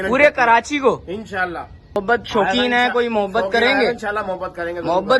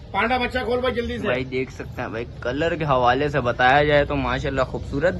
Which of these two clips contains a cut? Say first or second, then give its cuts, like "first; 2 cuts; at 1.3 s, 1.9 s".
first; 1 cut; at 2.0 s